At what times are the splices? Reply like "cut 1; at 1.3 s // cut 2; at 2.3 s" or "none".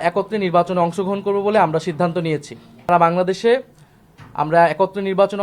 cut 1; at 2.9 s